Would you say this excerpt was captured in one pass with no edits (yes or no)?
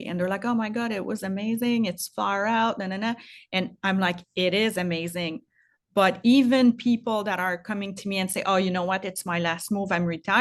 yes